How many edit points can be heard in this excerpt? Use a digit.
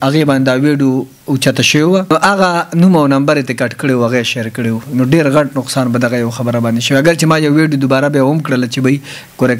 1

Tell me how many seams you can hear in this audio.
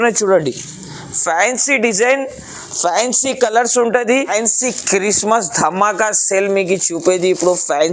1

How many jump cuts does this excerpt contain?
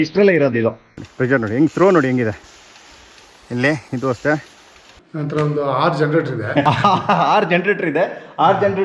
3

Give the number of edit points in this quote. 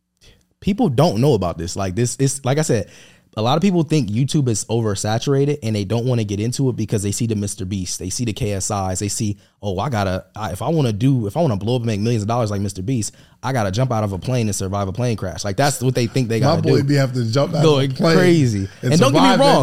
0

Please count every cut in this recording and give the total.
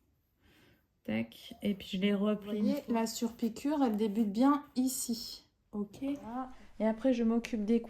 2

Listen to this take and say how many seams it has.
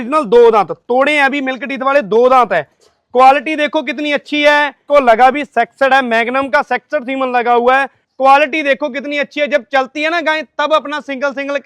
2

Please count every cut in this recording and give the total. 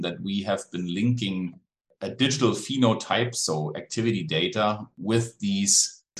0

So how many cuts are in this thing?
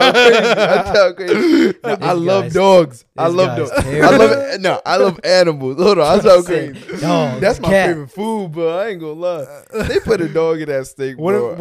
0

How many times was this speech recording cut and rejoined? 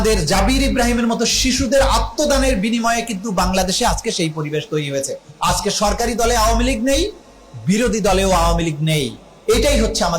0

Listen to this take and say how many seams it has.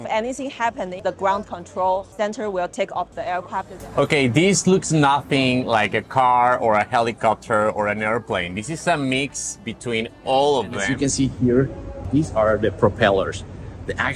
4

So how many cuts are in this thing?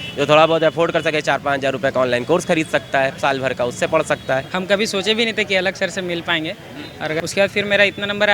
2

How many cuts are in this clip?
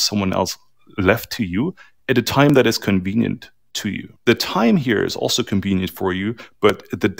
0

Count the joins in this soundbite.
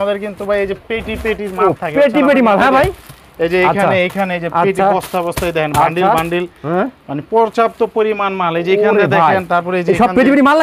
0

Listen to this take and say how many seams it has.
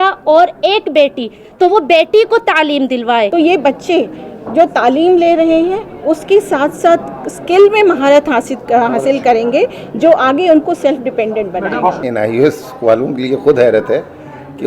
2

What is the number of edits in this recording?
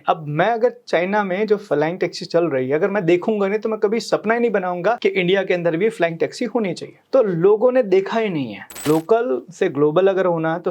3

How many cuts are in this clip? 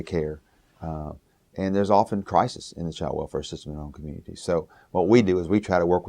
1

